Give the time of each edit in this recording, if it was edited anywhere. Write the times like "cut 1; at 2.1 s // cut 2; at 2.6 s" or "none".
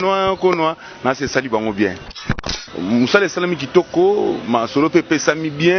cut 1; at 2.3 s